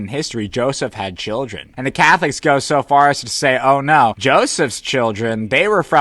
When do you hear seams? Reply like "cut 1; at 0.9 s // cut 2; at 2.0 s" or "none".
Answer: cut 1; at 1.8 s